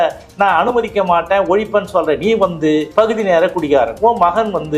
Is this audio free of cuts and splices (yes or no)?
no